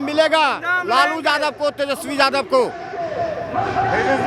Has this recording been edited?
no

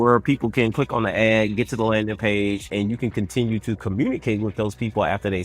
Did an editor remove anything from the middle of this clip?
yes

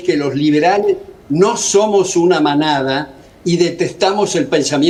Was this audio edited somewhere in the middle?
no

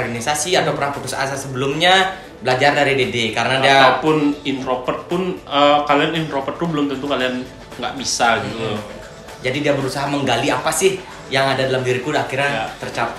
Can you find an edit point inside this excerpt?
no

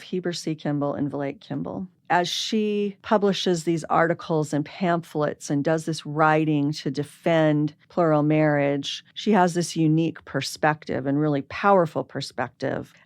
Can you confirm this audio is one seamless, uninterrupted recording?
no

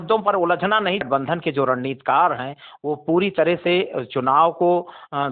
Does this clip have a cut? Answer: yes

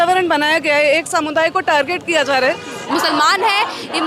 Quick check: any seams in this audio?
yes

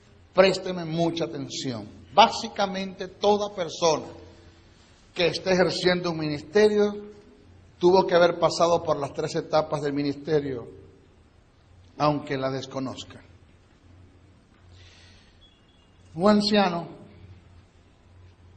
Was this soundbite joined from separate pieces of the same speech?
yes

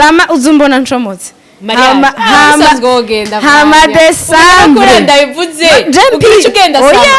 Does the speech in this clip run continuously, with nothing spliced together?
yes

